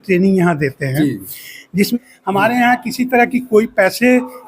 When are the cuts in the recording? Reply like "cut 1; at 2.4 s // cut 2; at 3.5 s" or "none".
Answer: cut 1; at 1.9 s